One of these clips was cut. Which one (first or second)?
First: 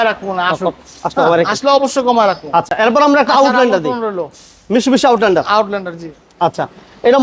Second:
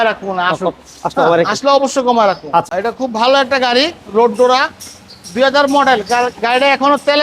second